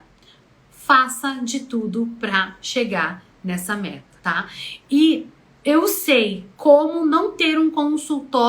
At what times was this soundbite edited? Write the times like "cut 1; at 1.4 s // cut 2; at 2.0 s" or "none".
cut 1; at 4.1 s